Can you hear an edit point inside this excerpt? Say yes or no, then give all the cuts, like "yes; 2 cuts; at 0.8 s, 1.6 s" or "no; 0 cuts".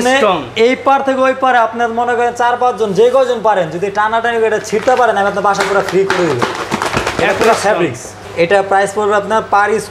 yes; 1 cut; at 8.2 s